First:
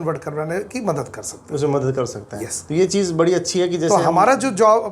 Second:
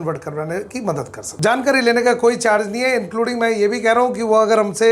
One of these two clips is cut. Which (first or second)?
second